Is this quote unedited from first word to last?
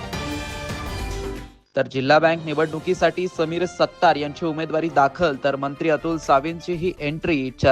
yes; 0 cuts

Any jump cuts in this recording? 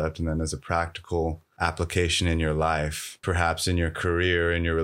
yes; 2 cuts; at 1.5 s, 3.2 s

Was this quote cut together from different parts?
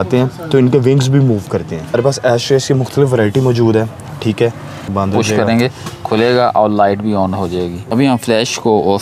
yes; 3 cuts; at 1.9 s, 4.9 s, 7.9 s

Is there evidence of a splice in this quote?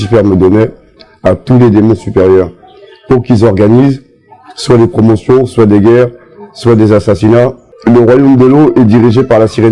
yes; 1 cut; at 7.7 s

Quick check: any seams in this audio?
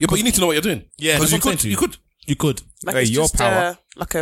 no; 0 cuts

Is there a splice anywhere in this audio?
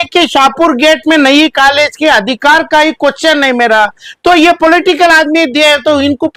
no; 0 cuts

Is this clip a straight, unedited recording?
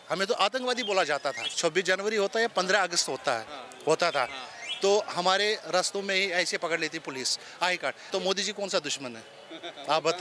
no; 2 cuts; at 1.5 s, 8.0 s

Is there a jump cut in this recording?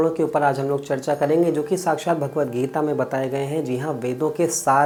no; 0 cuts

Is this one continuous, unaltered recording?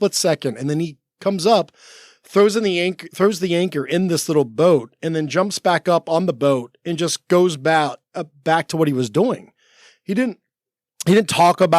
yes; 0 cuts

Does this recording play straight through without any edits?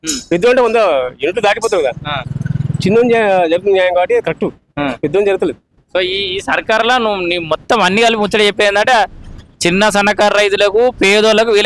yes; 0 cuts

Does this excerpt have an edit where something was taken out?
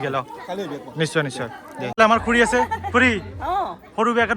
yes; 1 cut; at 1.9 s

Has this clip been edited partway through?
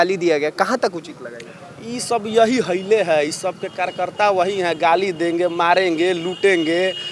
no; 0 cuts

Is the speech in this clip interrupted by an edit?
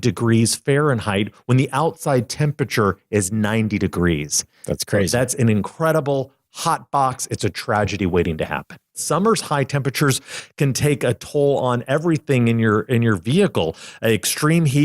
yes; 1 cut; at 9.0 s

